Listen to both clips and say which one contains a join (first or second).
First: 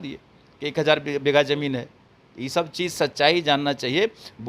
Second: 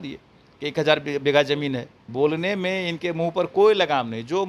second